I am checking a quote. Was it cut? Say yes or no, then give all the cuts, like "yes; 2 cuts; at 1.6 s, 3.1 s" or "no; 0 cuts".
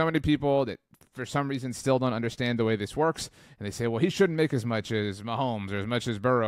no; 0 cuts